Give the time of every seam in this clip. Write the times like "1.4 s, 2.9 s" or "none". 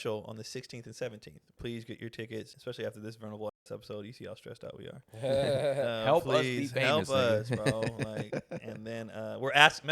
1.6 s, 2.5 s